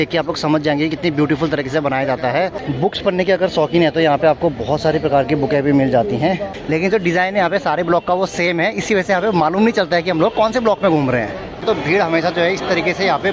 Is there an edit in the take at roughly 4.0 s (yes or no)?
no